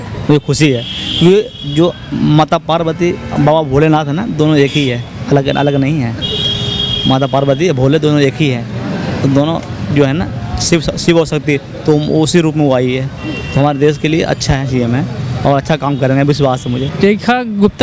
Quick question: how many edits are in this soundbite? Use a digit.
1